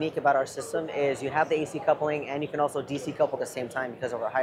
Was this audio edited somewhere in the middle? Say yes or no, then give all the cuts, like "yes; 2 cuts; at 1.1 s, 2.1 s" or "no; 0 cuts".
no; 0 cuts